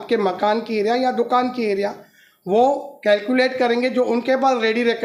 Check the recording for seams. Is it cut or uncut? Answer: uncut